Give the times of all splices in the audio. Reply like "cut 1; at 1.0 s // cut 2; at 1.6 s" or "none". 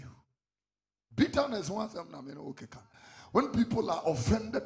none